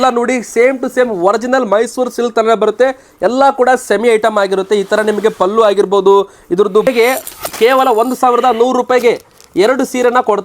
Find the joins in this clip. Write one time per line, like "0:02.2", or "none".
0:06.9